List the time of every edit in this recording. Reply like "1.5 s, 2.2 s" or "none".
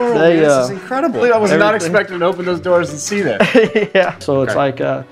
1.2 s, 4.2 s